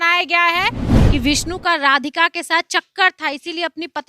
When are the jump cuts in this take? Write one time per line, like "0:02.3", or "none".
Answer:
0:00.9